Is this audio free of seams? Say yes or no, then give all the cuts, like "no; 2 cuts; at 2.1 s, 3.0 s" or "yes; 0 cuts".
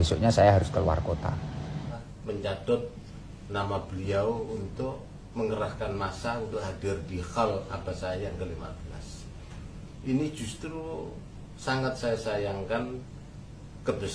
no; 1 cut; at 2.0 s